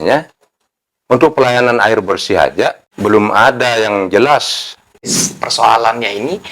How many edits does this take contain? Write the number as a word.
two